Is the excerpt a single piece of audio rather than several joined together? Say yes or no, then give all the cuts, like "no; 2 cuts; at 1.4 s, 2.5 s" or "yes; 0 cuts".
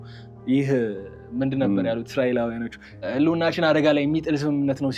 no; 1 cut; at 3.1 s